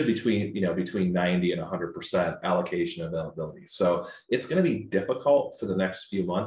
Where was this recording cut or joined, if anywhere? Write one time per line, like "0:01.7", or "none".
none